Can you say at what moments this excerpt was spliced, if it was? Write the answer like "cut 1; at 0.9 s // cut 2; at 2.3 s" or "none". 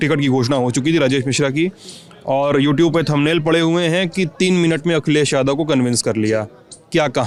none